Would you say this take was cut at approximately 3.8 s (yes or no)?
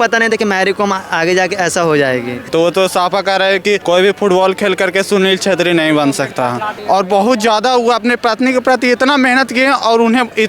yes